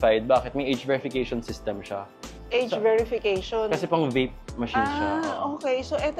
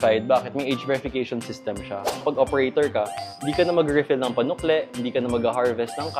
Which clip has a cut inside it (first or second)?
second